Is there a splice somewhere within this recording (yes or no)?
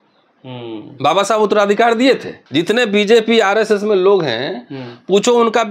yes